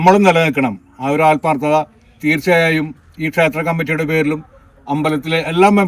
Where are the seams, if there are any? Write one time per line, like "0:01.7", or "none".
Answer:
none

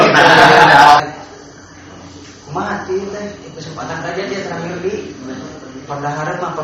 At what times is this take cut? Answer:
0:01.0

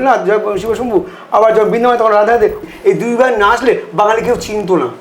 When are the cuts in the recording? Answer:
0:02.6

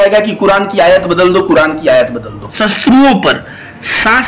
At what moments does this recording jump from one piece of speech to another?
0:02.5

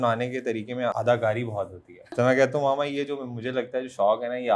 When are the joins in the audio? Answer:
0:00.9
0:02.0

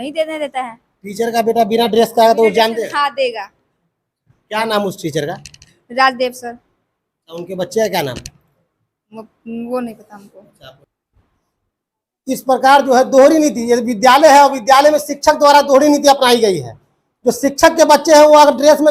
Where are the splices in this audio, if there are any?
0:10.8

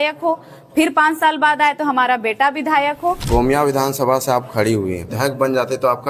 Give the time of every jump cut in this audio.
0:03.2
0:05.1

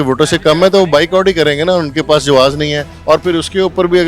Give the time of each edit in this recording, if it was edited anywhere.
0:02.9

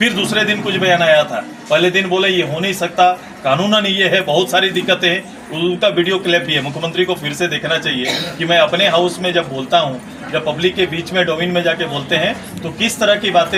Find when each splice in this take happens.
none

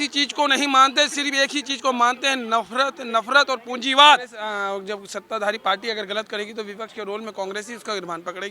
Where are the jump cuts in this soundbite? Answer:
0:04.4

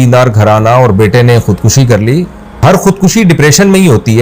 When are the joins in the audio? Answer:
0:02.6

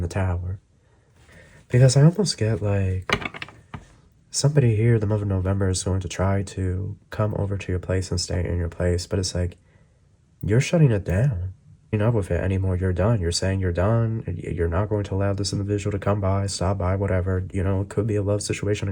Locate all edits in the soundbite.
0:01.3
0:11.9

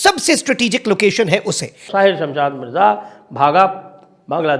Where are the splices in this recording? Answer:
0:01.8

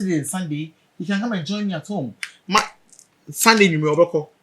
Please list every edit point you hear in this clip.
none

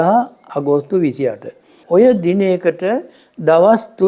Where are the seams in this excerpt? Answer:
0:01.7

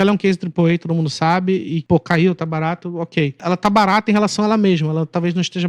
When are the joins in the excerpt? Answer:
0:01.8
0:03.4

